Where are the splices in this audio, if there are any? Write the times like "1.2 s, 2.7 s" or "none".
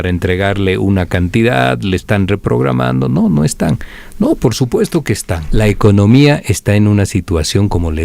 5.4 s